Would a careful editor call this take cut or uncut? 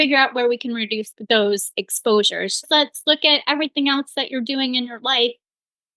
cut